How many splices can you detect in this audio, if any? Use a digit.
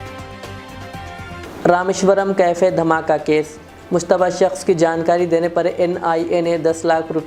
1